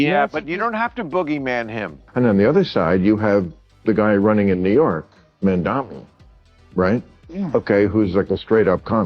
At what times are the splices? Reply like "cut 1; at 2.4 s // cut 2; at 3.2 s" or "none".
cut 1; at 2.0 s